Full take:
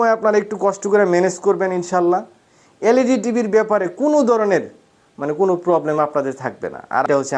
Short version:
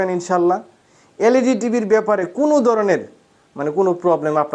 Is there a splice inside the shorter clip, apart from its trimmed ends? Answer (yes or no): no